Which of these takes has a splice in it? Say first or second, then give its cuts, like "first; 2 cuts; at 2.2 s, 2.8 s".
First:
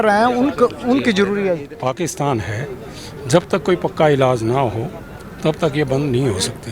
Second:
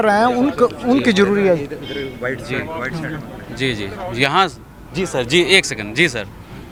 first; 1 cut; at 1.7 s